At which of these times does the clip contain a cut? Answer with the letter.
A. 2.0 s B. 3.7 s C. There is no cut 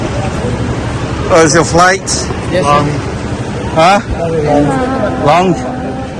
C